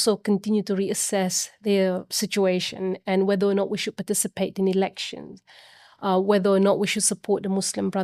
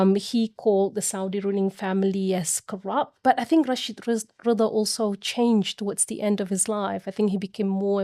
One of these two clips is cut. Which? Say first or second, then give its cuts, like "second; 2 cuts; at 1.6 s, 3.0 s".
second; 1 cut; at 3.1 s